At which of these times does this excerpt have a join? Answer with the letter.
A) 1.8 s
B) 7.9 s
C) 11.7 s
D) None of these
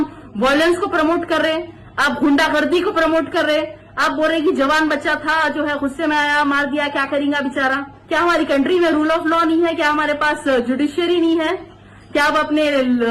B